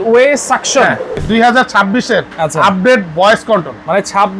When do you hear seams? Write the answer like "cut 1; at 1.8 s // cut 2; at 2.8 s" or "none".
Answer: cut 1; at 1.2 s